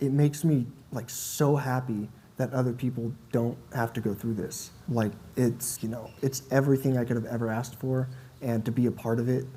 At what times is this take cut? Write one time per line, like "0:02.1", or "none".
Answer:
none